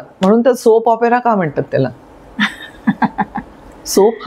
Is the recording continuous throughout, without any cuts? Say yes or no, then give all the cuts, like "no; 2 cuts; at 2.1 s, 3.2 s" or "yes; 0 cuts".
yes; 0 cuts